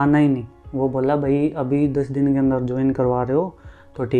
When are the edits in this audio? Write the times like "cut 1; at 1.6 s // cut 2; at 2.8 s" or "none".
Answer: none